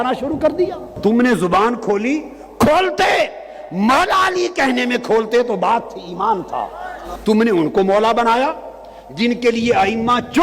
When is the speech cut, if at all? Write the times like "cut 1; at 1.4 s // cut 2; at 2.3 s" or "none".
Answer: cut 1; at 1.0 s // cut 2; at 7.1 s